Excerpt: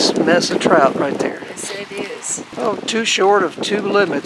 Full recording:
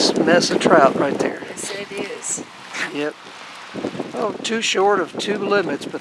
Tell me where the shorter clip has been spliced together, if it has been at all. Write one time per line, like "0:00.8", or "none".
0:02.5